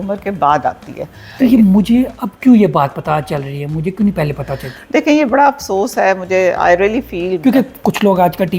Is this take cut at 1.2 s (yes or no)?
yes